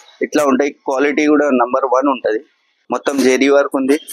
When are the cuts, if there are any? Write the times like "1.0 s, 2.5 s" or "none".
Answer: 2.8 s